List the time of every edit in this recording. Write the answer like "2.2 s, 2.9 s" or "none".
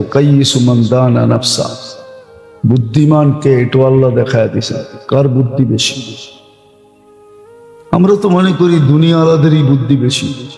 none